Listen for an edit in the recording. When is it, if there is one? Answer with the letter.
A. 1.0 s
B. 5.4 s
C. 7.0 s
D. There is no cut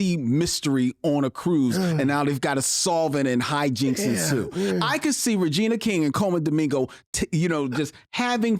D